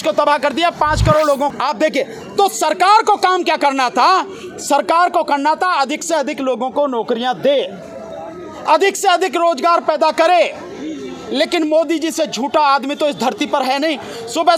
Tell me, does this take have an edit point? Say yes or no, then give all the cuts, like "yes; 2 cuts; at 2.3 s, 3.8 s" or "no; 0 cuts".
yes; 1 cut; at 1.5 s